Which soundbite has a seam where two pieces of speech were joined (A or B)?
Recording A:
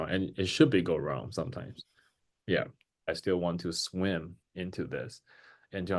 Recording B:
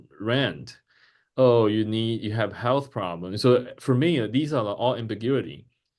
A